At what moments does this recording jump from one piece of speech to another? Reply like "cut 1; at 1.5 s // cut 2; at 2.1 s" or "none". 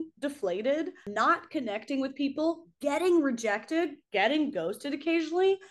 cut 1; at 1.1 s